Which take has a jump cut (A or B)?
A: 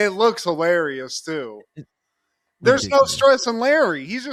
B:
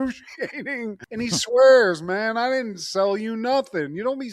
B